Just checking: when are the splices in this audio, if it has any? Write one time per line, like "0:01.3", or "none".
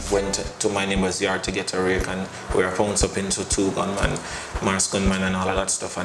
none